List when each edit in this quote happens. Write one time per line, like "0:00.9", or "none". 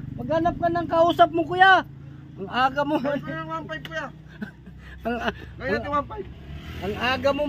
none